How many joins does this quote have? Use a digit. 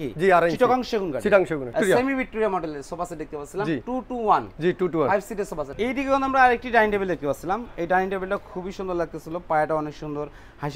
2